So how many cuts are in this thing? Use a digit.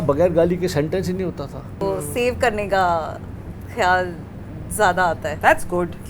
1